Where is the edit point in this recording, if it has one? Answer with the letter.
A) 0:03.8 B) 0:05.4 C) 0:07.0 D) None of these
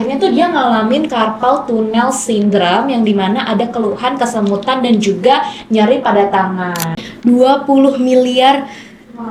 C